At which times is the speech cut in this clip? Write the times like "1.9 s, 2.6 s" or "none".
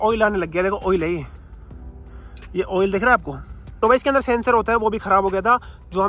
3.6 s